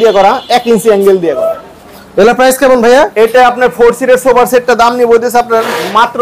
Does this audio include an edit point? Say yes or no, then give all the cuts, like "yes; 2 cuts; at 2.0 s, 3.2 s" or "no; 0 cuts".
no; 0 cuts